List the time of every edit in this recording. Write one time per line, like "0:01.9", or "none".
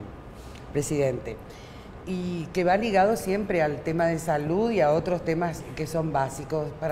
0:05.2